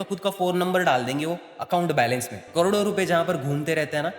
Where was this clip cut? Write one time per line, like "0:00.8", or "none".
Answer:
0:02.4